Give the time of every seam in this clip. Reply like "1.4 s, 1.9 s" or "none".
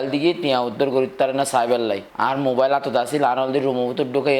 2.1 s